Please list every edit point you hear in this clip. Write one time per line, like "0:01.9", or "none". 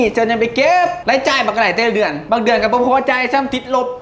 0:01.0
0:02.2

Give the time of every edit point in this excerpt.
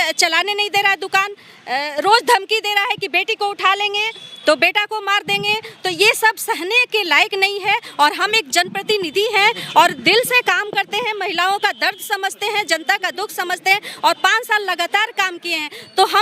none

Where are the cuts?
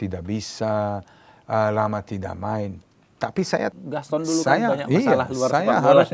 0:03.7

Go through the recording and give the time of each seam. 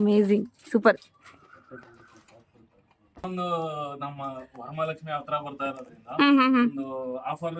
0:02.8

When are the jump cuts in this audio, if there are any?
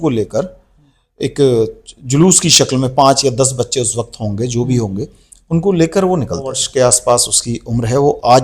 0:06.6

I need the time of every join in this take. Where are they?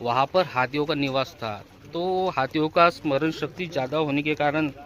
none

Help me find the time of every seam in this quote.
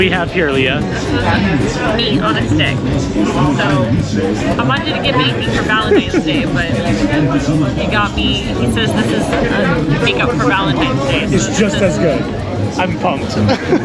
none

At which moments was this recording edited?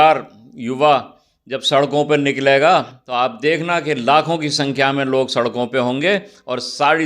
0:03.0

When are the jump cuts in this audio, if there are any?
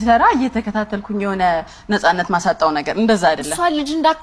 none

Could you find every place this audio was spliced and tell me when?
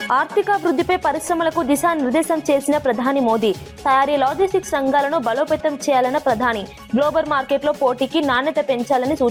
none

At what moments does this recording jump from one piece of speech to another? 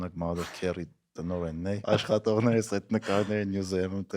0:01.8

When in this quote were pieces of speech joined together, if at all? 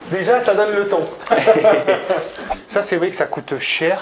0:02.5

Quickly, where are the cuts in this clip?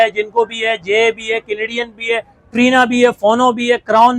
none

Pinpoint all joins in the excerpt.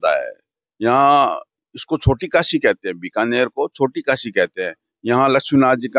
none

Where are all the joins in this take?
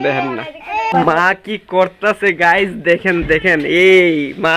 0:00.9

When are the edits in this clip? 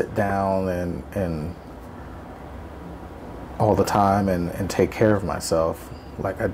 none

